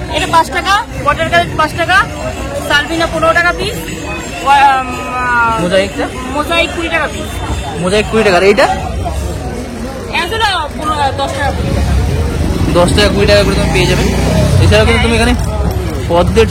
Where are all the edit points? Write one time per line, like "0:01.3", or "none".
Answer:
none